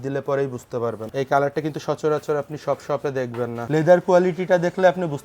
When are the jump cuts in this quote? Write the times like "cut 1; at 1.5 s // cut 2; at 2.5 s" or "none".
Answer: cut 1; at 1.1 s // cut 2; at 3.6 s